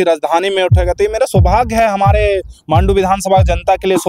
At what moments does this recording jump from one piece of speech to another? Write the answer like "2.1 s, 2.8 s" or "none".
none